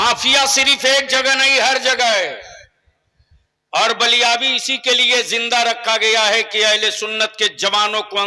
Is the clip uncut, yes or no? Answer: yes